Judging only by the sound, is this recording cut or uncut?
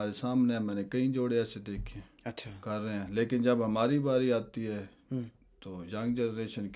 uncut